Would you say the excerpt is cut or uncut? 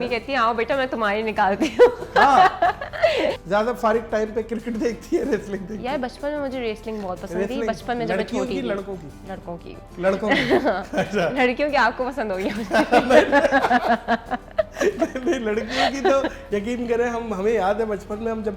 cut